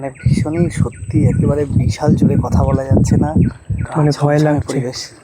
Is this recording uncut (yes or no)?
no